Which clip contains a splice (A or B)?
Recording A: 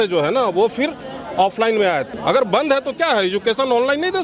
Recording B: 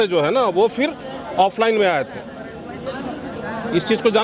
A